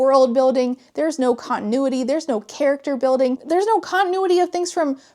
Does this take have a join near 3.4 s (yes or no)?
yes